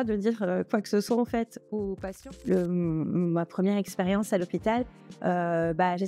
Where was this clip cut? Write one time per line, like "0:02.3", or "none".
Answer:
0:02.2